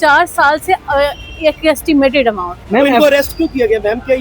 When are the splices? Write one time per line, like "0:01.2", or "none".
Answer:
0:02.5